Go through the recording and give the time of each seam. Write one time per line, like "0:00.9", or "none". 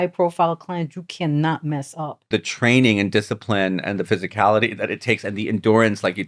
0:02.3